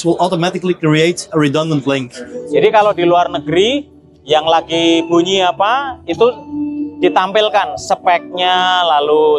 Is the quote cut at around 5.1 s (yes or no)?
no